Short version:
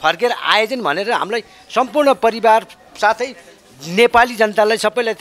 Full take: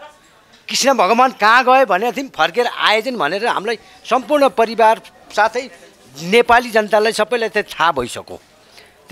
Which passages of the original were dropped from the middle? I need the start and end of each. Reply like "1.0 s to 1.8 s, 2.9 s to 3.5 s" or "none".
none